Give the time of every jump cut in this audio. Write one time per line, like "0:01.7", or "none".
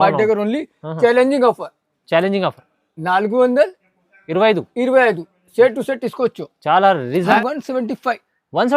0:07.4